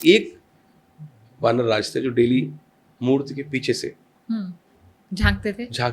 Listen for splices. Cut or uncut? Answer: uncut